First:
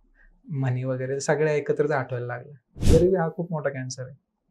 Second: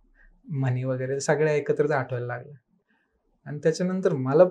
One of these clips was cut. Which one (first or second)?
first